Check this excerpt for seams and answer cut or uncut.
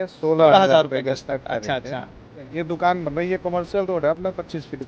cut